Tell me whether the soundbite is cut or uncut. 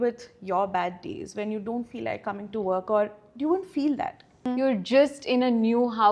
cut